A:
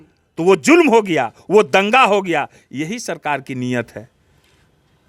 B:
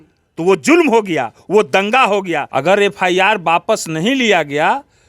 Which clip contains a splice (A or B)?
B